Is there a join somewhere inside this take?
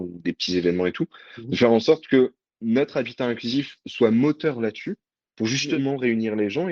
yes; 1 cut; at 5.7 s

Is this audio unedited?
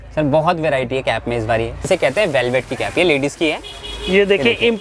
no; 1 cut; at 1.8 s

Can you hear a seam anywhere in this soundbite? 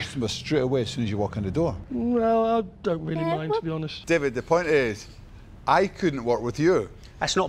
yes; 1 cut; at 3.9 s

